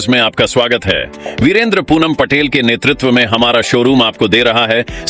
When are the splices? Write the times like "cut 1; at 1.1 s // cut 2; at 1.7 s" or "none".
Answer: none